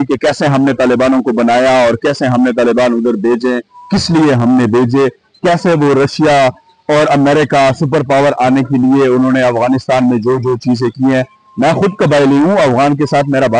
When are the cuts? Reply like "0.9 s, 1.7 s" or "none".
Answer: none